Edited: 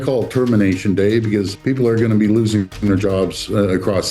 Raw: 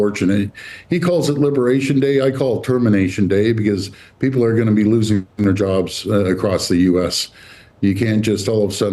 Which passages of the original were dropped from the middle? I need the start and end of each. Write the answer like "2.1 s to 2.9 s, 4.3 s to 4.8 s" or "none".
3.9 s to 4.1 s